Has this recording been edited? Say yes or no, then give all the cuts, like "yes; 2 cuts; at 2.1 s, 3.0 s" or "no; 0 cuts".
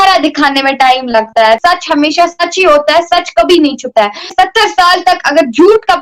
no; 0 cuts